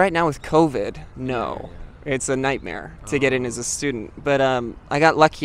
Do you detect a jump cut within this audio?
no; 0 cuts

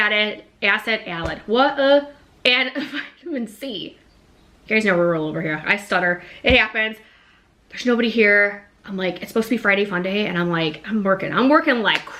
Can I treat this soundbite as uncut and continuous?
yes; 0 cuts

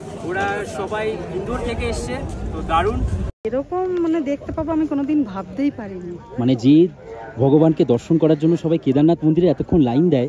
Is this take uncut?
no; 1 cut; at 3.3 s

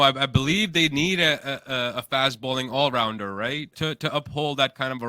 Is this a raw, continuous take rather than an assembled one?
yes; 0 cuts

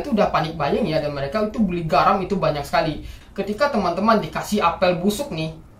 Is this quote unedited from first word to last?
no; 1 cut; at 3.1 s

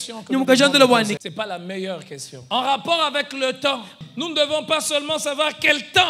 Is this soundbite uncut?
no; 3 cuts; at 1.2 s, 2.3 s, 4.0 s

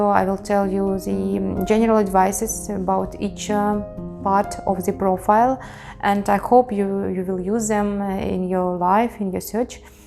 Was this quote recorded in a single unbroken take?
yes; 0 cuts

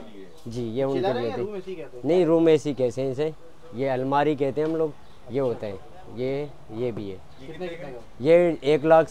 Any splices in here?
no; 0 cuts

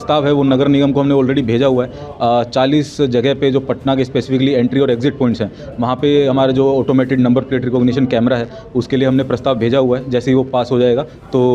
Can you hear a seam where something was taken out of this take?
no; 0 cuts

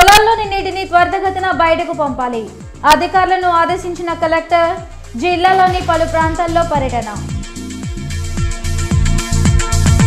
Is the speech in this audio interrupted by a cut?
no; 0 cuts

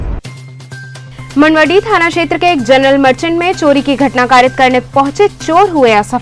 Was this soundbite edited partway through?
no; 0 cuts

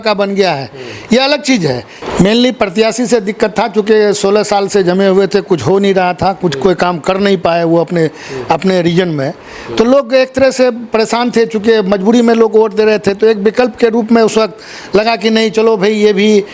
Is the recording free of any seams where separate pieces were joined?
no; 1 cut; at 2.0 s

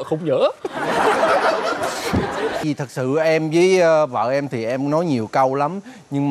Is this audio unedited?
no; 1 cut; at 2.6 s

